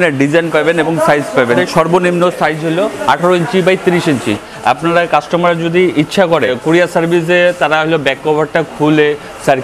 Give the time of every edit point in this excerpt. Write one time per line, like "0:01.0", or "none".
0:01.6
0:04.4
0:06.5